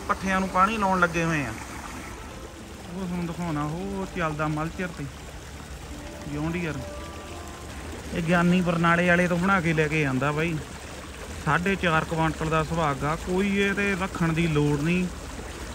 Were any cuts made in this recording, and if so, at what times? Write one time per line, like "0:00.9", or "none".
0:02.1
0:07.7